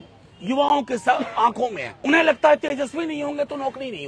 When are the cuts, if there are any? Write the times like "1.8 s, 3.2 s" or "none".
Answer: 1.9 s